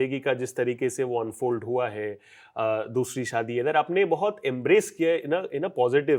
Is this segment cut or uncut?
uncut